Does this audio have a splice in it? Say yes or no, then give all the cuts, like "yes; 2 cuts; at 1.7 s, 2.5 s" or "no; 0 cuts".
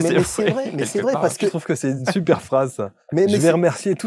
yes; 1 cut; at 1.7 s